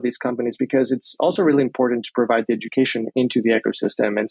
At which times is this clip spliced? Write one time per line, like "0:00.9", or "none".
none